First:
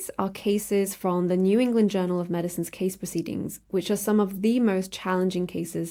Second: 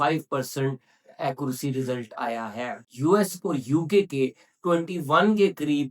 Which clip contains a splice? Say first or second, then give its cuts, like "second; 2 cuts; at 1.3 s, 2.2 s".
second; 1 cut; at 2.8 s